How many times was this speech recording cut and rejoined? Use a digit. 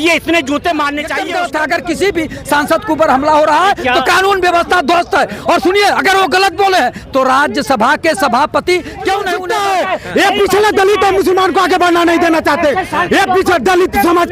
2